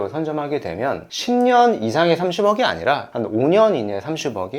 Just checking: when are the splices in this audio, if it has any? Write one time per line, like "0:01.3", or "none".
0:01.1